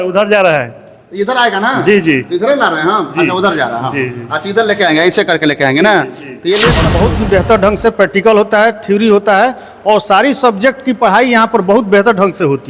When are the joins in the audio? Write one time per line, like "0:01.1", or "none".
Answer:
0:06.8